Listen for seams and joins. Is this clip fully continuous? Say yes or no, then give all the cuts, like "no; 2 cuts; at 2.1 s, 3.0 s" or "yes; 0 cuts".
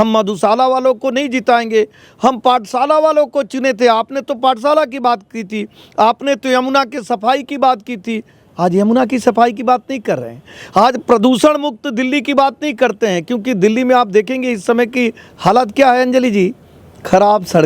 yes; 0 cuts